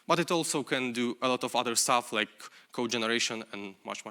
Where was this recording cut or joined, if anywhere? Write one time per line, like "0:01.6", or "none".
none

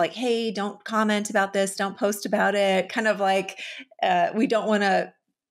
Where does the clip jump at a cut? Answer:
none

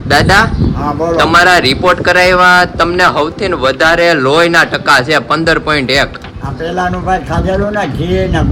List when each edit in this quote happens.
none

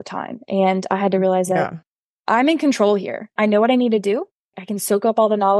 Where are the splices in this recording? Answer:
0:03.3
0:04.6

